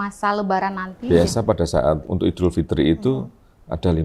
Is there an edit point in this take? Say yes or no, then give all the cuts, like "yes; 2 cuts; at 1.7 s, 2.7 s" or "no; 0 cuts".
yes; 2 cuts; at 1.0 s, 2.0 s